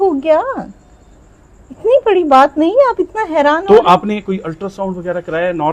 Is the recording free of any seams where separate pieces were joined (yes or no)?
yes